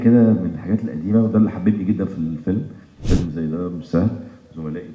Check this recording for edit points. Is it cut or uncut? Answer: cut